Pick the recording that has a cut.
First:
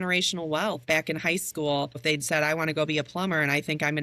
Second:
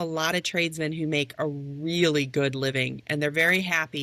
first; 2 cuts; at 0.8 s, 2.0 s

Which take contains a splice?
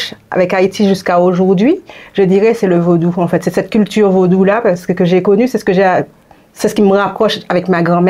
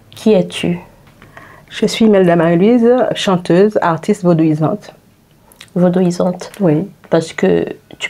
second; 1 cut; at 7.0 s

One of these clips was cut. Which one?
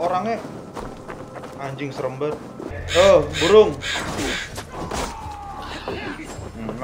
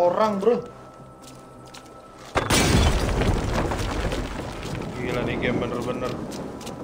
first; 1 cut; at 2.8 s

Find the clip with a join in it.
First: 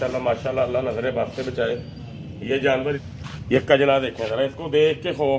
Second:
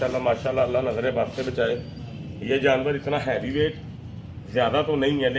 first; 1 cut; at 3.0 s

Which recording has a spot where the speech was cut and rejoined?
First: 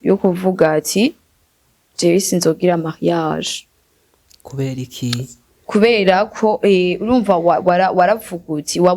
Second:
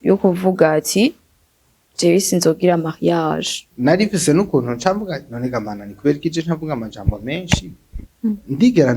second; 1 cut; at 3.6 s

